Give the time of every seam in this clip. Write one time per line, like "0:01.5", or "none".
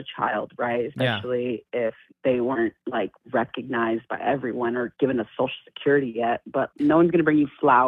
none